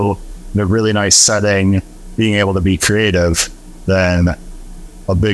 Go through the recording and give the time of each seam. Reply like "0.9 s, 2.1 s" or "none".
none